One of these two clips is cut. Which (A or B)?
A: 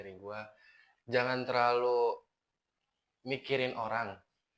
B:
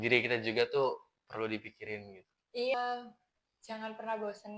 B